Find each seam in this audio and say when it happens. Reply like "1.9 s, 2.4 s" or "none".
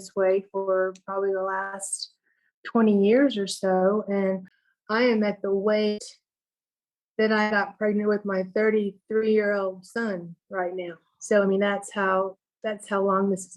4.5 s